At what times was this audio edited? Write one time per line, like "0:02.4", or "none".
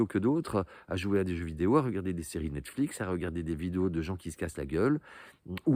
none